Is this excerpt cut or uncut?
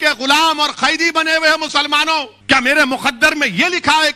cut